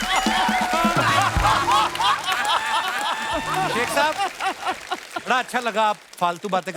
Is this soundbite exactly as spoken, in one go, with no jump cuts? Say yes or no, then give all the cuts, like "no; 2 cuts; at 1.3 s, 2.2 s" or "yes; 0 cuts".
no; 1 cut; at 3.8 s